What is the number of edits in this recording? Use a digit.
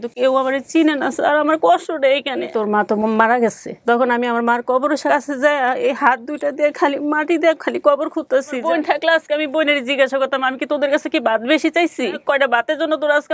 4